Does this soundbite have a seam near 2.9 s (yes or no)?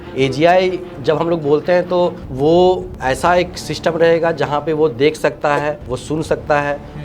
yes